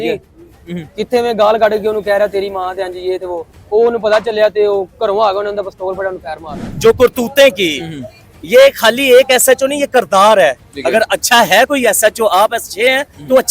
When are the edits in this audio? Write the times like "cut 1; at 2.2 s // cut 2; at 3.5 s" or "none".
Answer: cut 1; at 6.7 s